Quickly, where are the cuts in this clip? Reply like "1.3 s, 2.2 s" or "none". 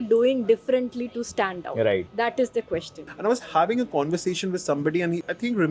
2.1 s, 3.0 s